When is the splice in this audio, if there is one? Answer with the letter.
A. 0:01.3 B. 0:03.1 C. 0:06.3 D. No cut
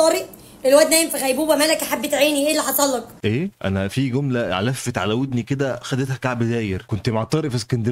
D